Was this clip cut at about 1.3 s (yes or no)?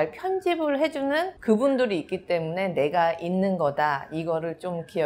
yes